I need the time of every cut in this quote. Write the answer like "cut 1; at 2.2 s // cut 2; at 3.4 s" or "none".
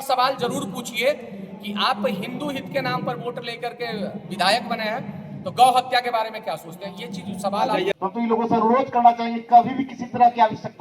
cut 1; at 7.9 s